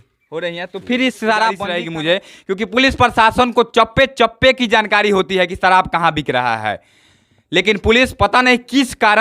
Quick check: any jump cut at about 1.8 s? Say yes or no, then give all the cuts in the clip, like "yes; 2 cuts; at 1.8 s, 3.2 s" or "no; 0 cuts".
yes; 1 cut; at 1.8 s